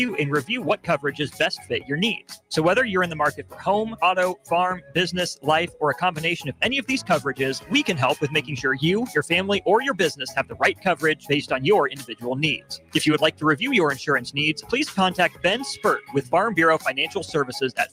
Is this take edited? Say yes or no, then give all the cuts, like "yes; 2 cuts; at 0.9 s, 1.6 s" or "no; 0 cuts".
no; 0 cuts